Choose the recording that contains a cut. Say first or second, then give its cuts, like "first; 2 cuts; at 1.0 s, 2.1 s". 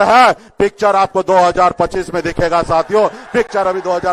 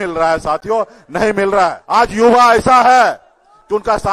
second; 1 cut; at 1.8 s